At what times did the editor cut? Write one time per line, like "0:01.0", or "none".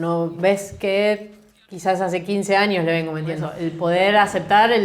0:03.5